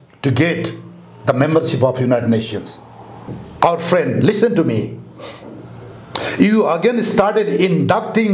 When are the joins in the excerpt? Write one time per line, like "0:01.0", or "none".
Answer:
0:03.4